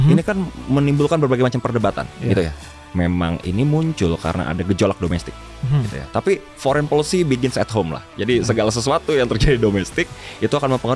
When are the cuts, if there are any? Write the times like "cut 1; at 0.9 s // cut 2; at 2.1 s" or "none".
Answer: cut 1; at 2.8 s